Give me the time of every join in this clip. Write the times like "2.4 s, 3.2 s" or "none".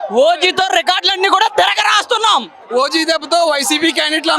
2.6 s